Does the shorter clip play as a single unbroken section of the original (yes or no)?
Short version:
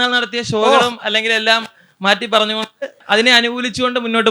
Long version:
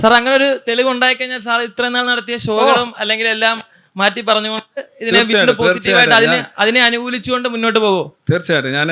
no